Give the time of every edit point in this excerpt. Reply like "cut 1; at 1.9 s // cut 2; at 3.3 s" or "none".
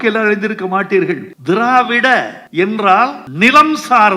cut 1; at 1.3 s // cut 2; at 2.4 s // cut 3; at 3.2 s